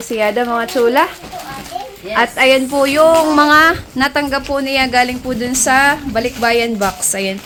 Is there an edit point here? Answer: no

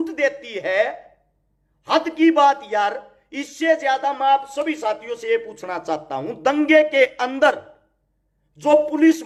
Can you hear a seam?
no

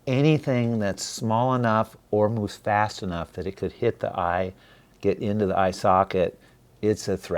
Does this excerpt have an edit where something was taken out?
no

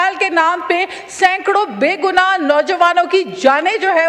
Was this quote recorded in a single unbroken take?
yes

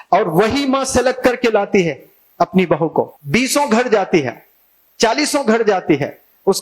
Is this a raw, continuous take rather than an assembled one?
no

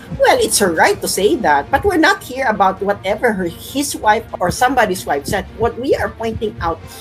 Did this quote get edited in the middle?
no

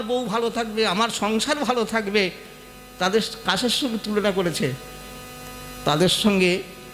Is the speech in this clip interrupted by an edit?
no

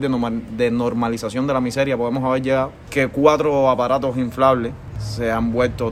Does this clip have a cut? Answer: no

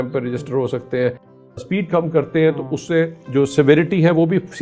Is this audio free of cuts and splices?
no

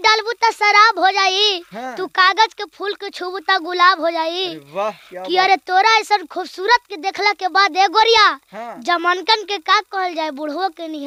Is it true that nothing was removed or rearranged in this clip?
yes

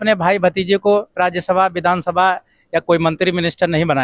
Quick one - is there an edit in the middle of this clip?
no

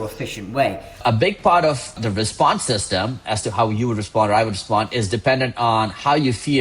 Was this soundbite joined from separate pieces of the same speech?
yes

